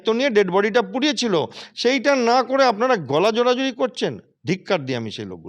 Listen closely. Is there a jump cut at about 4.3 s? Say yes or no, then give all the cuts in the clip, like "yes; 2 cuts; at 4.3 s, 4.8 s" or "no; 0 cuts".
no; 0 cuts